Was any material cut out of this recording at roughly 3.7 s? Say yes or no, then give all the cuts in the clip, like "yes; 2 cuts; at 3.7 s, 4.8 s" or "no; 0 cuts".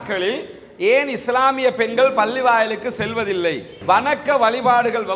yes; 1 cut; at 3.7 s